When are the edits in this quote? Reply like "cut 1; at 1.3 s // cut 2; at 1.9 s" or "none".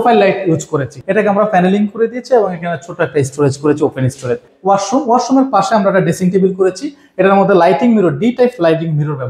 cut 1; at 1.0 s // cut 2; at 4.5 s